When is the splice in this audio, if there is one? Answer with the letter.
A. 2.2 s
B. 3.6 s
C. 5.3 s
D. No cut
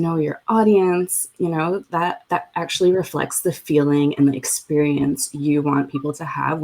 A